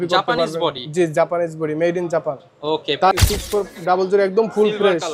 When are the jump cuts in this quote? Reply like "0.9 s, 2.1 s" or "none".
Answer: 3.1 s